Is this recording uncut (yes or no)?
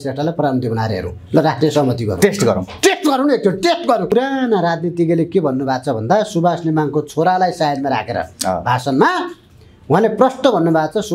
no